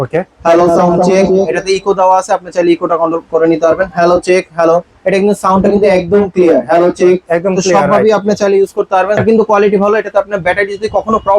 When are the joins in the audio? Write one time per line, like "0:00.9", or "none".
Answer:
0:09.2